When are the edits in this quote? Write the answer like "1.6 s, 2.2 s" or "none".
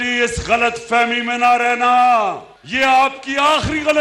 none